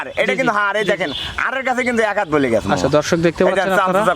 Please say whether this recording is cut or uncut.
uncut